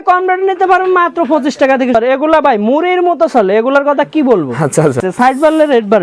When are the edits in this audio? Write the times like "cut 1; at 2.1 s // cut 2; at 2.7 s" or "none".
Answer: cut 1; at 1.9 s // cut 2; at 5.0 s